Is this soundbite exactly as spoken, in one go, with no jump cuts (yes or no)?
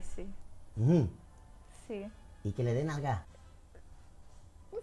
no